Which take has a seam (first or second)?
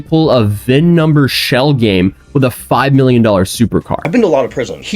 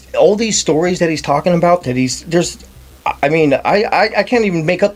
first